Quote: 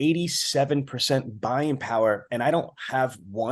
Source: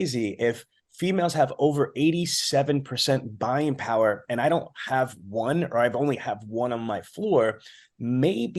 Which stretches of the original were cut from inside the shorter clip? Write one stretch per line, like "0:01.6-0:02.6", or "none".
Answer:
none